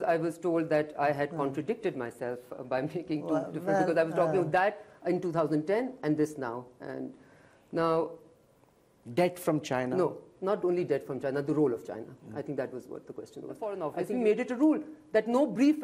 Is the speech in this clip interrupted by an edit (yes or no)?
yes